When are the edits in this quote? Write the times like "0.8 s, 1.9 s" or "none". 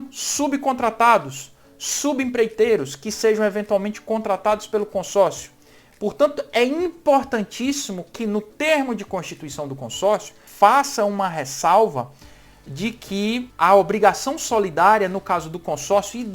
10.4 s, 13.5 s